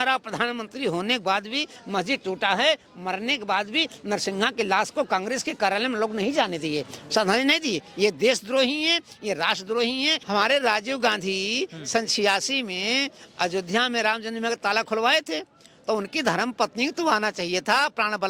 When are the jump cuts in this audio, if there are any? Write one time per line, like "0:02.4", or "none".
0:10.2